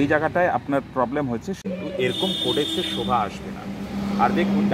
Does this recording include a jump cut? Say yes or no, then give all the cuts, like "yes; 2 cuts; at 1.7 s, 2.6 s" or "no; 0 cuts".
yes; 1 cut; at 1.6 s